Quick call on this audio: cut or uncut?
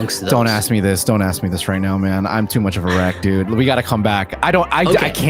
uncut